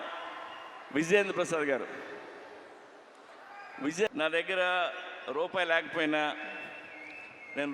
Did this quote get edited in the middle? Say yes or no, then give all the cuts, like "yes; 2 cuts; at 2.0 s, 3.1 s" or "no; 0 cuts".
yes; 1 cut; at 4.1 s